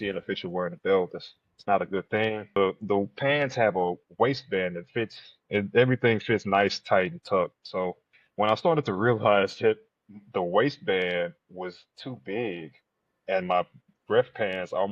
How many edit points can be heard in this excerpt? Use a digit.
1